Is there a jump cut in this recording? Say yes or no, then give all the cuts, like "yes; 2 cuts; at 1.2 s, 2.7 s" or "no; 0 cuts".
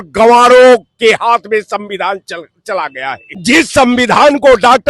yes; 1 cut; at 3.3 s